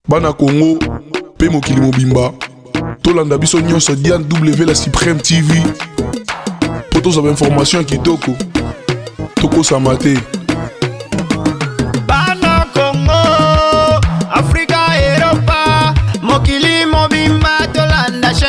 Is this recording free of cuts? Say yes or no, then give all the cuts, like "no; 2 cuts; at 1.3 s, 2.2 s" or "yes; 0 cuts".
yes; 0 cuts